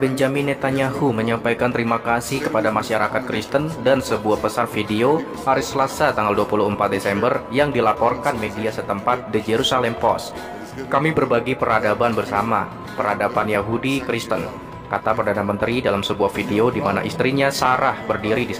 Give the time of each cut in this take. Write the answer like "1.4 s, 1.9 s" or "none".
none